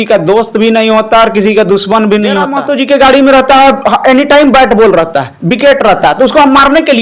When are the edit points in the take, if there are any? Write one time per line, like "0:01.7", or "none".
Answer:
0:02.5